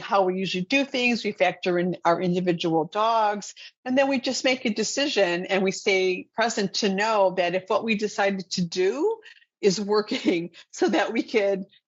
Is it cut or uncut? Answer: uncut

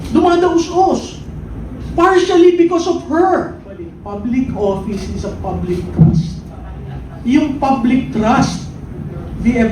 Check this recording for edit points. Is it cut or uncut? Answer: cut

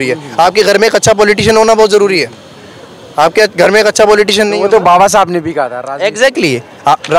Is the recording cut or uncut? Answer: uncut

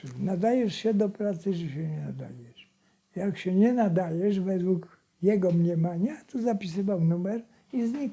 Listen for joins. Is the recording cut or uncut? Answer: uncut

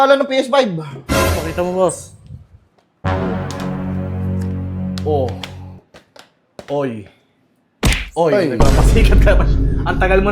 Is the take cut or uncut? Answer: uncut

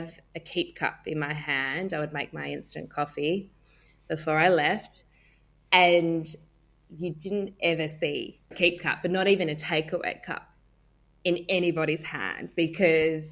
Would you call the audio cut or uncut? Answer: cut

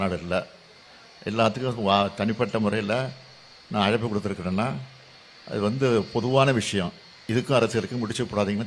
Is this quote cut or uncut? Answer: uncut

